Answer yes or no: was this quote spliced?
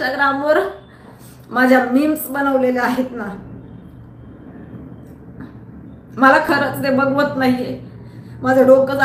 no